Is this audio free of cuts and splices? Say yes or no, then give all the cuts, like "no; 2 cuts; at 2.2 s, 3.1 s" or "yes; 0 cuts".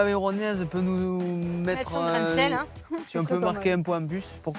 yes; 0 cuts